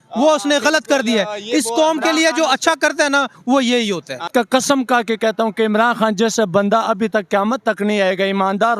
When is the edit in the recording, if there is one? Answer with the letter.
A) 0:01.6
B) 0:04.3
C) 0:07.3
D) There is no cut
B